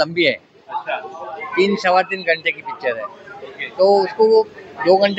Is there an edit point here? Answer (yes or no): no